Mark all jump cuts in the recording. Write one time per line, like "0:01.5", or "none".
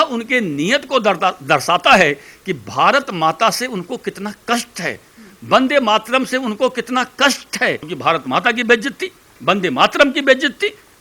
0:07.9